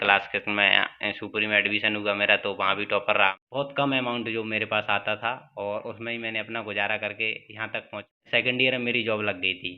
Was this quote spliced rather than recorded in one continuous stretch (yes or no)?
yes